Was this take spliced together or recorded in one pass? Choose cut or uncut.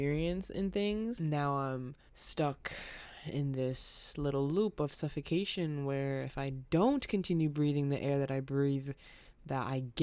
cut